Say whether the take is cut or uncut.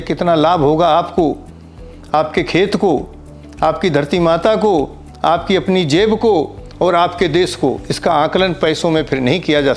uncut